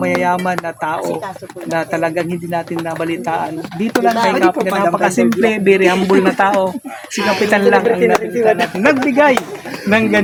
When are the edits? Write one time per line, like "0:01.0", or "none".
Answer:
none